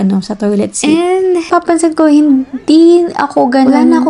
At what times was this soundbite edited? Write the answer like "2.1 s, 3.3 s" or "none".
1.5 s